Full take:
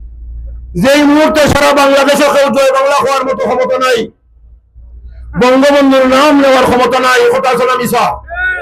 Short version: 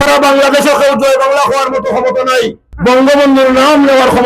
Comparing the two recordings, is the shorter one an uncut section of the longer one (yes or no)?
no